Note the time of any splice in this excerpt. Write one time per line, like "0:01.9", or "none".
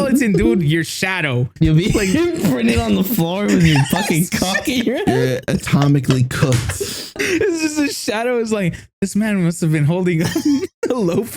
0:01.5
0:07.2